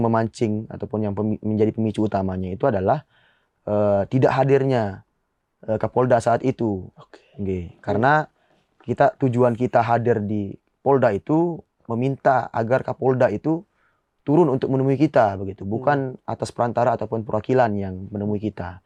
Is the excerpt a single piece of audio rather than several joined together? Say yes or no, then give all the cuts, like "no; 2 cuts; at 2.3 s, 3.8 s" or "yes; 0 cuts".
yes; 0 cuts